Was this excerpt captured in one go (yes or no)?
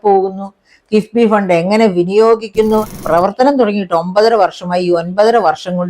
no